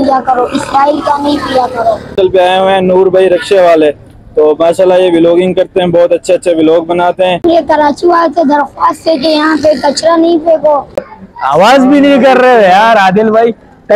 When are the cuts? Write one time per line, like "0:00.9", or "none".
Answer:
0:02.2
0:07.4
0:11.2